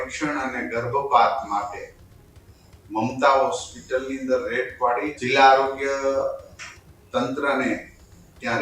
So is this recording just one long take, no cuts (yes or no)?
no